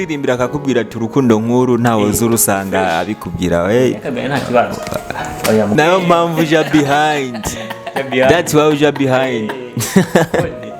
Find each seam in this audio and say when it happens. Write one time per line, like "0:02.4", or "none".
0:05.7